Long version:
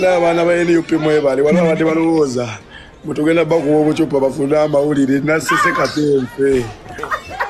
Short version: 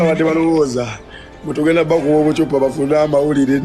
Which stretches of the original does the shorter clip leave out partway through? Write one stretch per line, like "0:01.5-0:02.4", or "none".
none